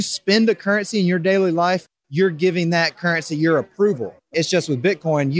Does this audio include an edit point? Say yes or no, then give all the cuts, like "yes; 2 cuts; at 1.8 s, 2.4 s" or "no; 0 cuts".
yes; 1 cut; at 4.3 s